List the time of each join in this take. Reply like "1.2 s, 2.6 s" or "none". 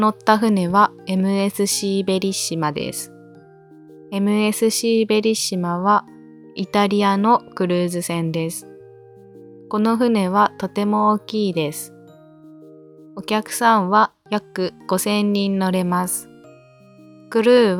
none

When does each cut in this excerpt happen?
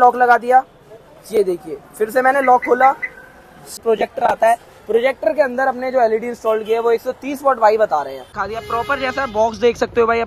3.8 s, 8.3 s

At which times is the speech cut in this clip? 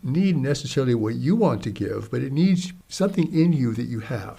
2.8 s

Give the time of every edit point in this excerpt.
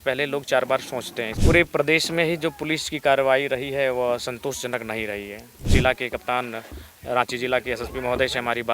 1.2 s, 5.6 s

